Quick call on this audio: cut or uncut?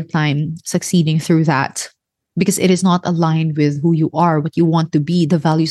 uncut